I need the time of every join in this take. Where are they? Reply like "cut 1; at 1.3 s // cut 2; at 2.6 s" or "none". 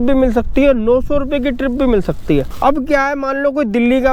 none